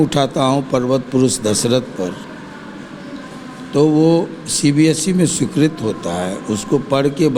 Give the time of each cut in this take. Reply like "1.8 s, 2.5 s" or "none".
none